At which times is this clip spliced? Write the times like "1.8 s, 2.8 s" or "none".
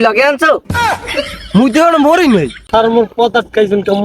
2.6 s